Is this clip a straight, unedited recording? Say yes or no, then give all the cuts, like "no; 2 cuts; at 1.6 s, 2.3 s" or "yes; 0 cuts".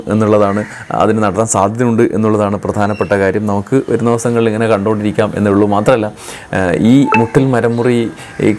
yes; 0 cuts